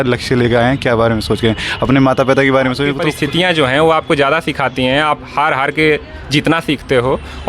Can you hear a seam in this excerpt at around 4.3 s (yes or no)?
no